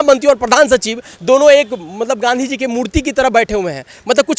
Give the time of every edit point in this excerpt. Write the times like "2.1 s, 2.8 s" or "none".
none